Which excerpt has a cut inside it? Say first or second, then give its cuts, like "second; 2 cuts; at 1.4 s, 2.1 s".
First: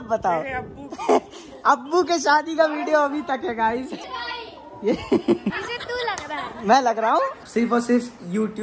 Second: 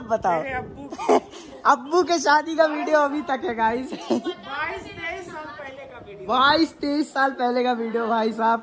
first; 3 cuts; at 4.0 s, 5.7 s, 7.4 s